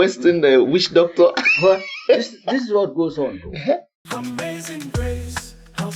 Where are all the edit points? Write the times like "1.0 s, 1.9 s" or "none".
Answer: 3.9 s